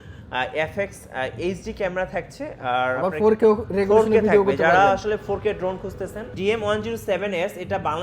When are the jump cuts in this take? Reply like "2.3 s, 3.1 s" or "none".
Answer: 6.3 s